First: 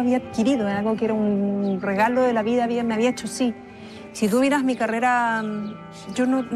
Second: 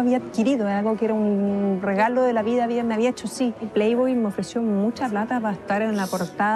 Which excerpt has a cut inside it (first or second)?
second